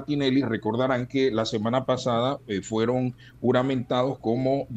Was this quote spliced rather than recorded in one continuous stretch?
no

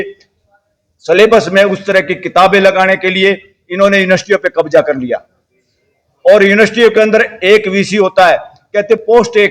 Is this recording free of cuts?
yes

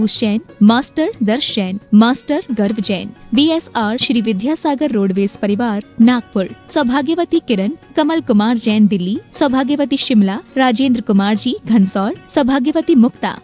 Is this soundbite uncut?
yes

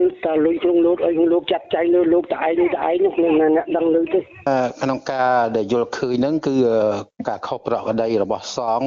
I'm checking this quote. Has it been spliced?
yes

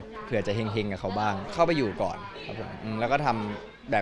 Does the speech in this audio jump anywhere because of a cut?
yes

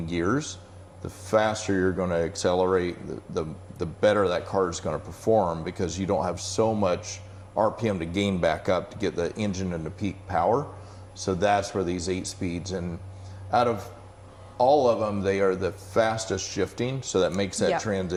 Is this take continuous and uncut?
yes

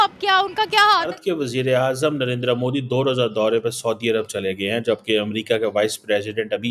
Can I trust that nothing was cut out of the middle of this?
no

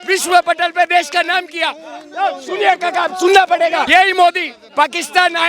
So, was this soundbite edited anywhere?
yes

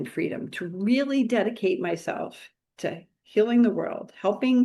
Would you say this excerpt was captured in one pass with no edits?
yes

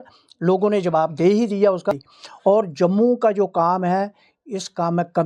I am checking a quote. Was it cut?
yes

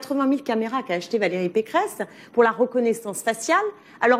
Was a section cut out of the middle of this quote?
no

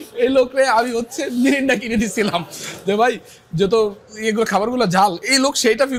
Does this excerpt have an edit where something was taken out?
no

